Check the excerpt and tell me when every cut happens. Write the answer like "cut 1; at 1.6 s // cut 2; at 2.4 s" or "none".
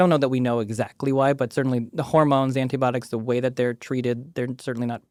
none

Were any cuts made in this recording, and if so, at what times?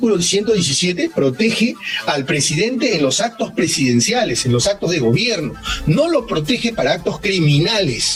none

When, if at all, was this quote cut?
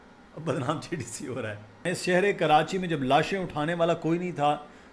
cut 1; at 1.9 s

